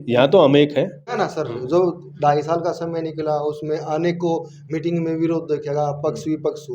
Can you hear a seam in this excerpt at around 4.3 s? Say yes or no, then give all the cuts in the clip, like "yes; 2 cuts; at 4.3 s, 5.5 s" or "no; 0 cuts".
no; 1 cut; at 1.1 s